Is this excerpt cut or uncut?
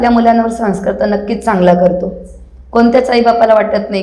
uncut